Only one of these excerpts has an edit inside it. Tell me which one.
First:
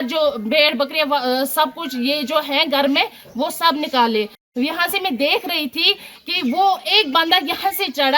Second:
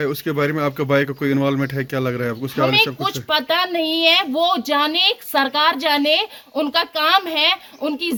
first; 1 cut; at 4.4 s

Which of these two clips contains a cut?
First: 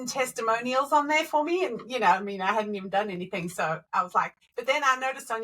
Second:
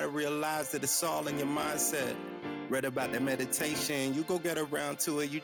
first; 1 cut; at 4.1 s

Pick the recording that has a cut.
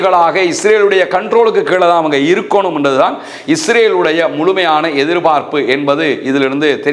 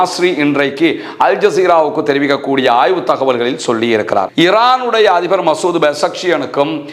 second; 1 cut; at 4.3 s

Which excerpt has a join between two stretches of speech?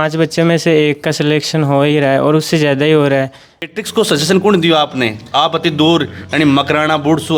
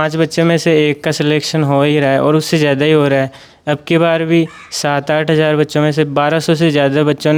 first; 1 cut; at 3.7 s

